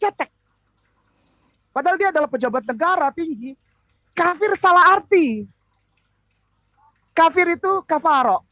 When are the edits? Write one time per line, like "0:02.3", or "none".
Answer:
none